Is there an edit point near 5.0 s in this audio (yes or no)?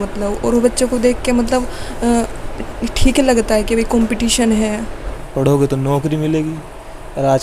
yes